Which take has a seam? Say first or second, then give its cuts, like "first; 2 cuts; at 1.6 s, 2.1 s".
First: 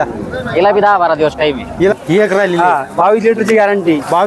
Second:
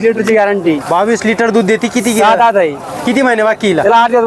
first; 1 cut; at 1.9 s